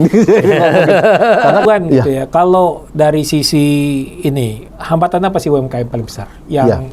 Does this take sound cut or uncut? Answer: cut